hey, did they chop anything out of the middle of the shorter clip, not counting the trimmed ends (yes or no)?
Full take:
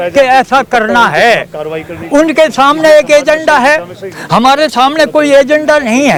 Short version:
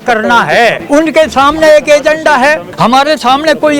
yes